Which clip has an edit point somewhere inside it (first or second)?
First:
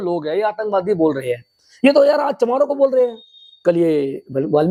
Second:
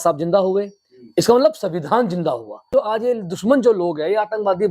second